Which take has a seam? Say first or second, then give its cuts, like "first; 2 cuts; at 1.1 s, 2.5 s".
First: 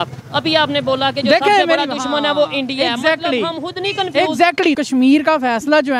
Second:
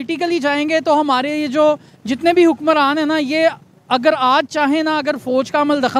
first; 1 cut; at 4.7 s